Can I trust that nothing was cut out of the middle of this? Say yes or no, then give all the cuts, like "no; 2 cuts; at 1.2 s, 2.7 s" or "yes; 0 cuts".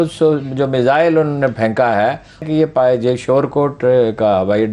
no; 1 cut; at 2.5 s